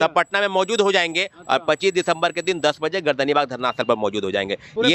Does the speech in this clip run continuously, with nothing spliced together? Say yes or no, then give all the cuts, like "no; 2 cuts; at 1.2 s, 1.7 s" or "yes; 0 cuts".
yes; 0 cuts